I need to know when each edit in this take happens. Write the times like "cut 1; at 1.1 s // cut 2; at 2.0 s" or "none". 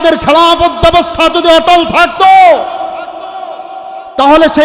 none